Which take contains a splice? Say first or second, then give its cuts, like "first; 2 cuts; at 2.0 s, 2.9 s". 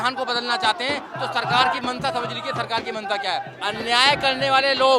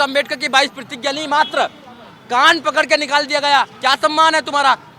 first; 1 cut; at 3.5 s